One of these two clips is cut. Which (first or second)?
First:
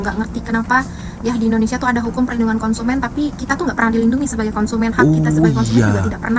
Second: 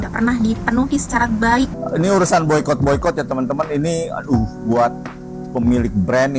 second